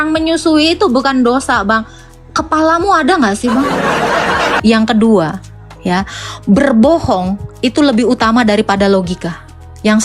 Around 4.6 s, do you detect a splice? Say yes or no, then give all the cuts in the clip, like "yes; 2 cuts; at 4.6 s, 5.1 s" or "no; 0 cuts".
yes; 1 cut; at 4.6 s